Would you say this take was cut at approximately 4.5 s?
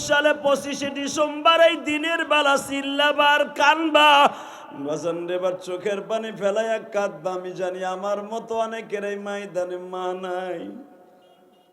yes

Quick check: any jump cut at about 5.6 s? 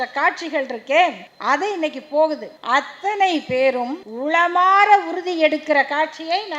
no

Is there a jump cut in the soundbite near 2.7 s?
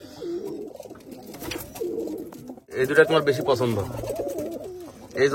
yes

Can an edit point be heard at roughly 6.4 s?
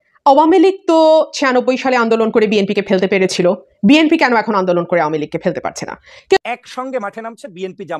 yes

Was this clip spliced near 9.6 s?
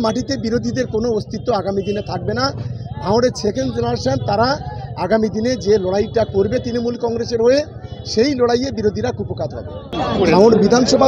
yes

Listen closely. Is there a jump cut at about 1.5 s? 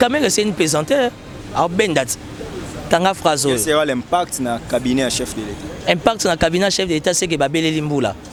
no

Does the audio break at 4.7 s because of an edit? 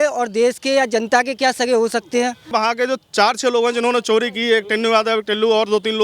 no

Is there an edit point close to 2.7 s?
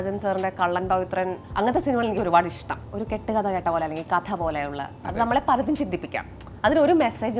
yes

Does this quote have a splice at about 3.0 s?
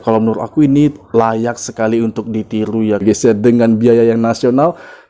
yes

